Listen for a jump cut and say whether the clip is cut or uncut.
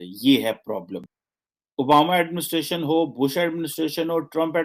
uncut